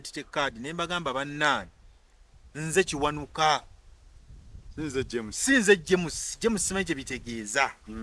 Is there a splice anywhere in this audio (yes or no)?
no